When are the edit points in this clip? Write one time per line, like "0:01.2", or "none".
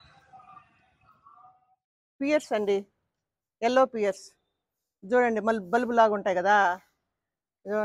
0:01.6